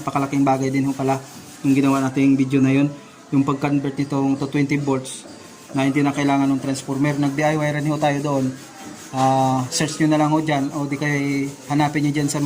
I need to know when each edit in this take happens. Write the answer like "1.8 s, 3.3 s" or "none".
none